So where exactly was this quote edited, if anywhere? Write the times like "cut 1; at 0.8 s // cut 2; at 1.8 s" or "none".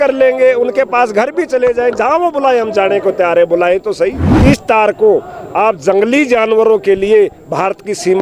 cut 1; at 4.3 s